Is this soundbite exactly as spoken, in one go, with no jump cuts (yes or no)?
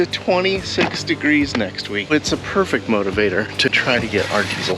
no